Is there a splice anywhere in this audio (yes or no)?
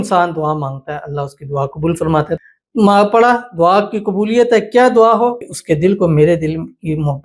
yes